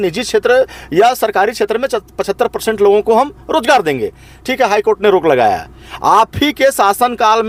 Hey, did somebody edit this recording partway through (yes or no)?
no